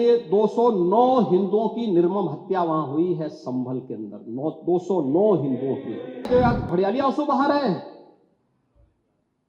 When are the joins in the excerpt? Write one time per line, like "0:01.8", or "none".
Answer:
0:06.3